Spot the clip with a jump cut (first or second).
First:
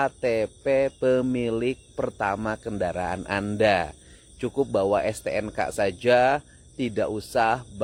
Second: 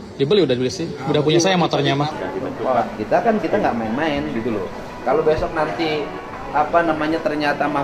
second